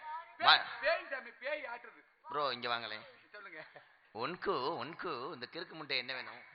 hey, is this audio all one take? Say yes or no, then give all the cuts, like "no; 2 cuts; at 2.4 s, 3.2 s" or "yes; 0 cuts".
yes; 0 cuts